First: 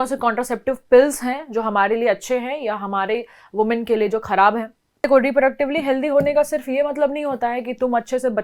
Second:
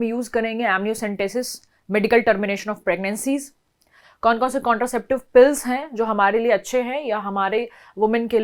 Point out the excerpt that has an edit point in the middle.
first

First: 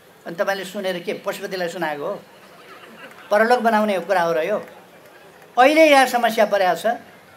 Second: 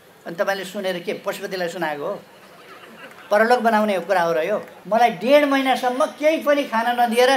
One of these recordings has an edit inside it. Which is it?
second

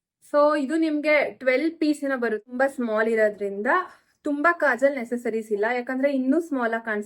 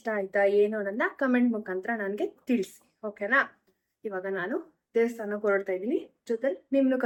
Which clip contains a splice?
first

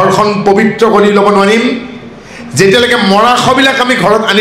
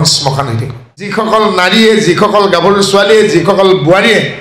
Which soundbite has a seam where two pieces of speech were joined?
second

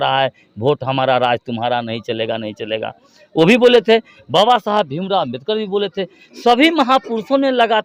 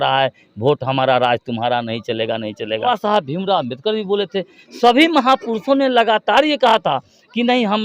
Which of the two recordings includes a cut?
second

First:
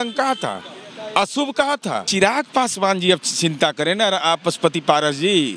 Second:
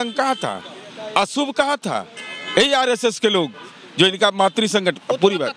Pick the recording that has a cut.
first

